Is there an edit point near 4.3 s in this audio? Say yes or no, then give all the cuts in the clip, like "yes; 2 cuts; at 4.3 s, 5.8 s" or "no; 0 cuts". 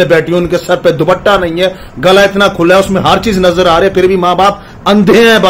no; 0 cuts